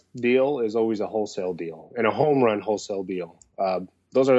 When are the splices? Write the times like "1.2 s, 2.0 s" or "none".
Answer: none